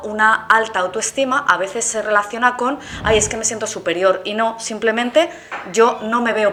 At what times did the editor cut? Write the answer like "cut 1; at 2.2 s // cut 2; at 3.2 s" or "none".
none